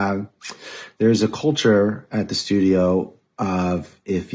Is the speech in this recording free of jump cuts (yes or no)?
yes